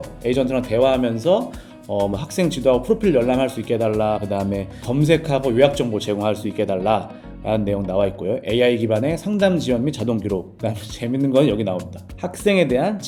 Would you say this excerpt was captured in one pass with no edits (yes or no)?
yes